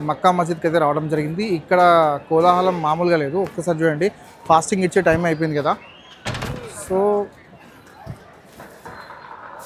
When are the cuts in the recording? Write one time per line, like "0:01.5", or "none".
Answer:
none